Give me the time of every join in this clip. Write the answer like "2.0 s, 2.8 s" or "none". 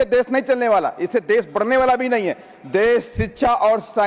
none